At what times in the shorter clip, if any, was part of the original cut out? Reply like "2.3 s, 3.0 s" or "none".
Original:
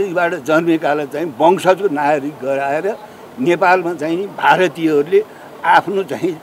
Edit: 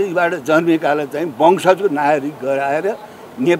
none